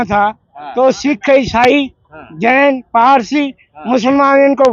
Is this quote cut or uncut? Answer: uncut